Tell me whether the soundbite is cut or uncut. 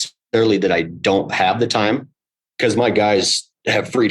uncut